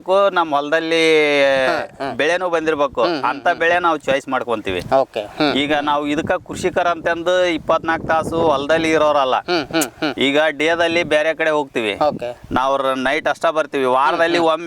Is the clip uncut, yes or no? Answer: yes